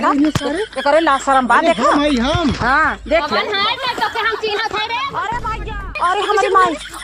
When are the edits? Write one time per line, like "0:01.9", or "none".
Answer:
0:06.0